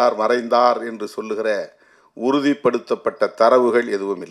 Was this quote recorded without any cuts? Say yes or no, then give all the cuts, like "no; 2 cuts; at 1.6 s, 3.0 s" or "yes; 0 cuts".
yes; 0 cuts